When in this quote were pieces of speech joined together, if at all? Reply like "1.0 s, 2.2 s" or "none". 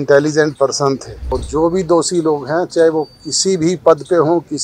1.1 s